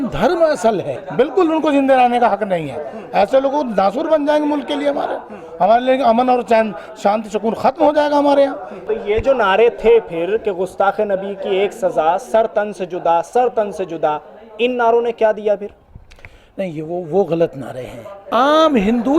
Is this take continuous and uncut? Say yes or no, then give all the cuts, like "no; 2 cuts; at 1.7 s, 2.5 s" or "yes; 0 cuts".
no; 3 cuts; at 0.9 s, 8.7 s, 18.3 s